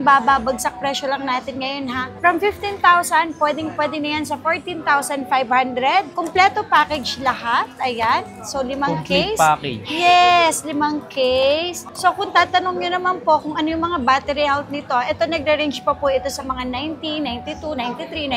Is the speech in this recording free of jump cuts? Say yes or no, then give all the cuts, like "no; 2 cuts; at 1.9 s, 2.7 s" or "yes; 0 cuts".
yes; 0 cuts